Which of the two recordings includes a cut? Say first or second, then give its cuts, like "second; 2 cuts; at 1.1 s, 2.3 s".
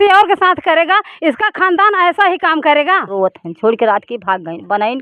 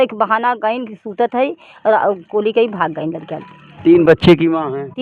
first; 1 cut; at 3.1 s